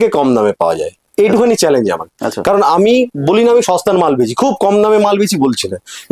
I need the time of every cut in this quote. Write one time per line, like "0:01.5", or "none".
none